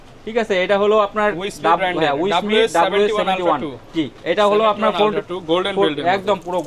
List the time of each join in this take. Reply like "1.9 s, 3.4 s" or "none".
none